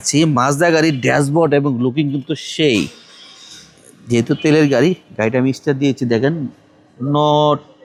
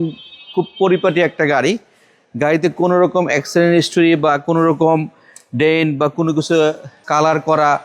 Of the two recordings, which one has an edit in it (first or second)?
second